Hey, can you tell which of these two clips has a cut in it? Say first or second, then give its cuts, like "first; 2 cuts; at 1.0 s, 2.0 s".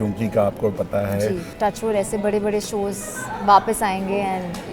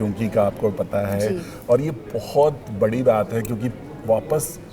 first; 1 cut; at 1.5 s